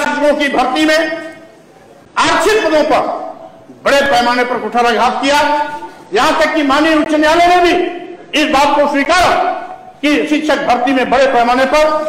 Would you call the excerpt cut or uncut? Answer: uncut